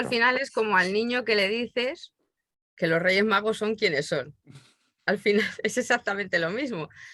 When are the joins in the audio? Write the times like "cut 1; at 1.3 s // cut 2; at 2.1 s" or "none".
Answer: none